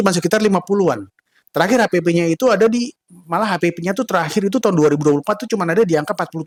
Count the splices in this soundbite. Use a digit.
0